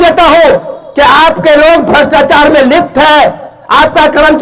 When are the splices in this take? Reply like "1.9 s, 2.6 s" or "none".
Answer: none